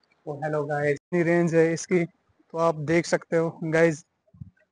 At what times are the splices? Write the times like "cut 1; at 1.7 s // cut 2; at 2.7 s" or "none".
cut 1; at 1.0 s